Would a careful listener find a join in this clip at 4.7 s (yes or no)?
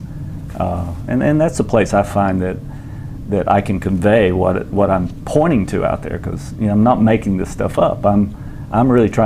no